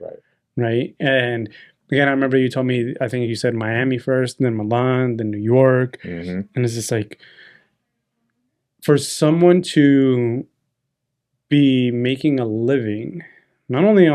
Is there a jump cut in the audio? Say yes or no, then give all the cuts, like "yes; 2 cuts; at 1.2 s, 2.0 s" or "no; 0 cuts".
no; 0 cuts